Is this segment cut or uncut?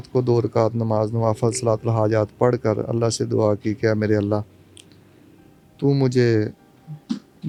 uncut